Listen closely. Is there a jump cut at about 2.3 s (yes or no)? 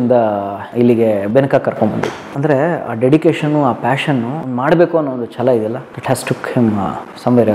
yes